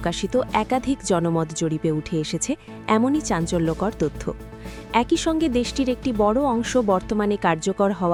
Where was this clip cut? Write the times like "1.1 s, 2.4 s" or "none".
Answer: none